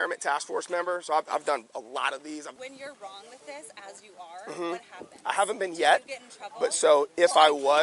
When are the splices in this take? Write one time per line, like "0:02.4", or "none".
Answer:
0:02.5